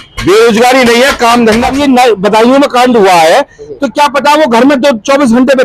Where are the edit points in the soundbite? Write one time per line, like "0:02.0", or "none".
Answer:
0:01.7